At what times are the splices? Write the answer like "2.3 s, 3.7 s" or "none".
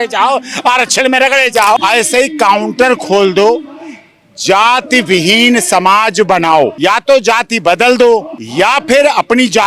1.8 s, 6.7 s, 8.4 s